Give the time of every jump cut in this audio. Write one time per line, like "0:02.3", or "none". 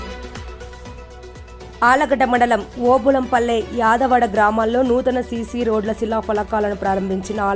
none